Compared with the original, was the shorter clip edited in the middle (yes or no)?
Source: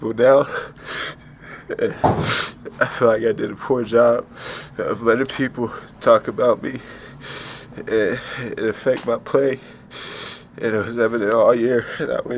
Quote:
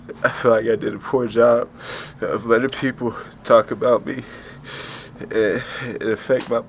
no